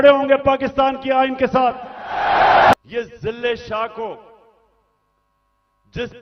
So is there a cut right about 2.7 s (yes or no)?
yes